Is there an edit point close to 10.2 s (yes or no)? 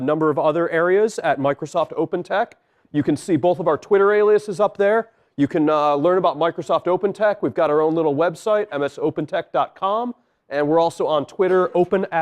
no